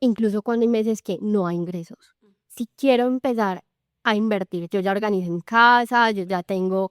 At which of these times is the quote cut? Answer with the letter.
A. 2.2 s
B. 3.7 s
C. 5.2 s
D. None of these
A